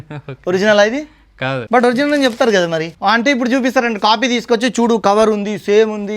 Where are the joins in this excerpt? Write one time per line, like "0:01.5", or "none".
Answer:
0:01.6
0:02.9